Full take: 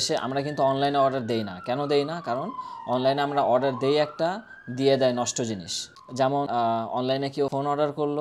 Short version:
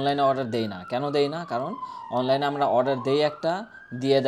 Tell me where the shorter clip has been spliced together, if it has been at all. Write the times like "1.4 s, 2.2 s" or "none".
none